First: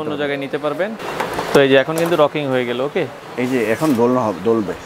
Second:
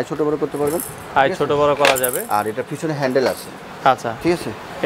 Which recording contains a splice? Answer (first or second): first